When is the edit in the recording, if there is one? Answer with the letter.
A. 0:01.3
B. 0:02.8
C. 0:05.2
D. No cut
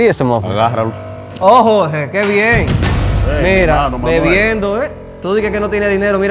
A